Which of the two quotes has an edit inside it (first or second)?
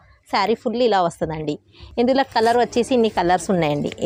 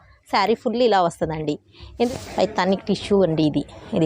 second